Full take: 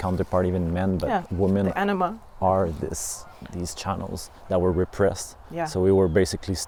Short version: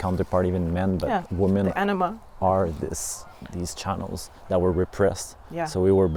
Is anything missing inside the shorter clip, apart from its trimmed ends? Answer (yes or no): no